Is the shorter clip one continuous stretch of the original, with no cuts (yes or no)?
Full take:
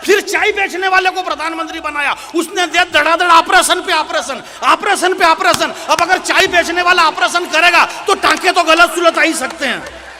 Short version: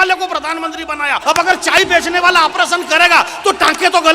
no